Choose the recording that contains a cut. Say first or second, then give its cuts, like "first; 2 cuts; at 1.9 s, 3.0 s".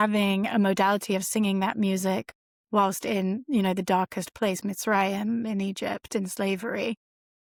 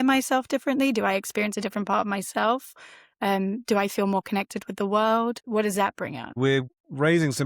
second; 1 cut; at 6.5 s